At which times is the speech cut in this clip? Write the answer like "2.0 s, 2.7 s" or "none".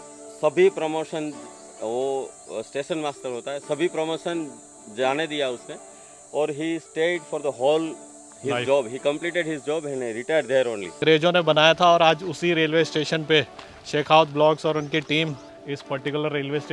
11.0 s, 15.5 s